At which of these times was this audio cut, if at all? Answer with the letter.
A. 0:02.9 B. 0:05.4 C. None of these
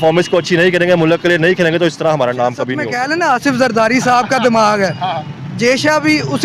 A